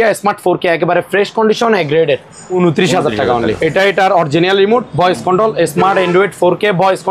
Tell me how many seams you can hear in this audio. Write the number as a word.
two